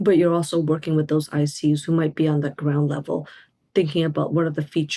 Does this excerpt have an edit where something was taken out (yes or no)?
no